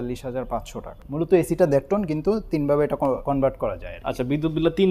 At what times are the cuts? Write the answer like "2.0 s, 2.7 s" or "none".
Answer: 1.0 s, 3.2 s